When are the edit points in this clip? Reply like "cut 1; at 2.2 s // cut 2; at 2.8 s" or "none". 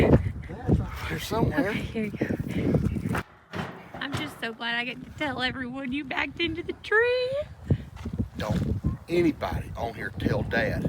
cut 1; at 3.2 s